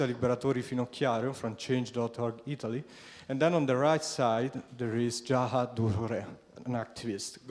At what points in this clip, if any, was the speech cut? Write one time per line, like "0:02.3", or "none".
0:04.8